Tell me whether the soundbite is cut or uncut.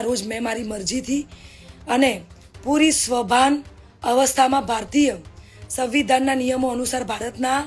uncut